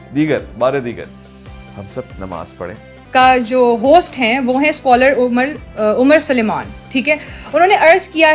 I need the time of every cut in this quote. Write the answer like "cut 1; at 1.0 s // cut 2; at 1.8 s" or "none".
cut 1; at 3.0 s